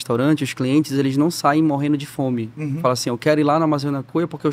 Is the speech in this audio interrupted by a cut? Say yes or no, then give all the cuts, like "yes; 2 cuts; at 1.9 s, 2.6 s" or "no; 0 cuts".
no; 0 cuts